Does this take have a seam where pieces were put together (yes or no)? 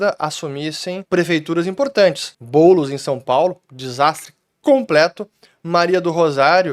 yes